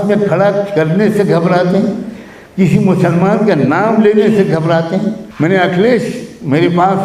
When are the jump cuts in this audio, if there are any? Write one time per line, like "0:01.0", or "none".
0:05.2